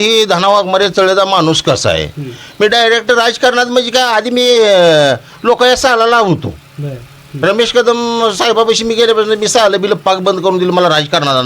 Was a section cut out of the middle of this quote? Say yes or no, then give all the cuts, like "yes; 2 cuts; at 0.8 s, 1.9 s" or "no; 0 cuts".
no; 0 cuts